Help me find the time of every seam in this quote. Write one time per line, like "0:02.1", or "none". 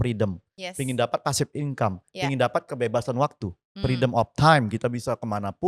none